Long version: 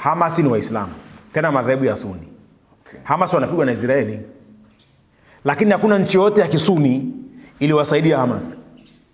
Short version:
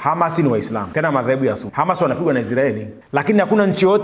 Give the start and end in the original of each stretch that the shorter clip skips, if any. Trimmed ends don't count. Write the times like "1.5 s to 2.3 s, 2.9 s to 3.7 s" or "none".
0.9 s to 1.3 s, 2.0 s to 3.0 s, 4.3 s to 5.3 s